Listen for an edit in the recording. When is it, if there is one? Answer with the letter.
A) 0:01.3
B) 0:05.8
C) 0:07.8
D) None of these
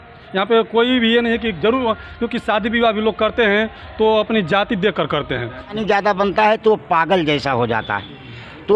B